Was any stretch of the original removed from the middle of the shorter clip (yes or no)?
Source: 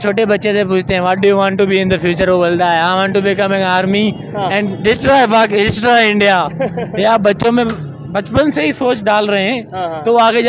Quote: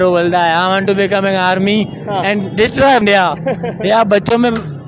yes